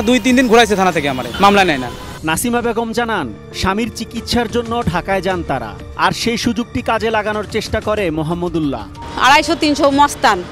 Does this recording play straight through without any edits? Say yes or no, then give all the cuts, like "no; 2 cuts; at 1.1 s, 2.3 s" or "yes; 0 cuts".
yes; 0 cuts